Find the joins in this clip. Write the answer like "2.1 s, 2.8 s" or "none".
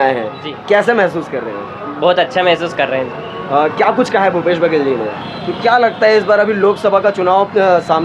5.2 s